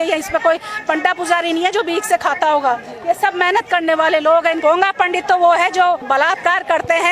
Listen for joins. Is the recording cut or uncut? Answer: cut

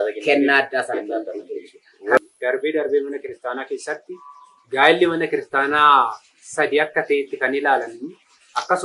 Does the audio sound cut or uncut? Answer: cut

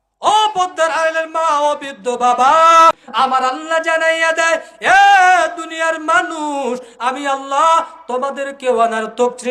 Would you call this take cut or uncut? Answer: cut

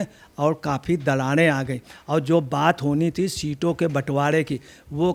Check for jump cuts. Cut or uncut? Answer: uncut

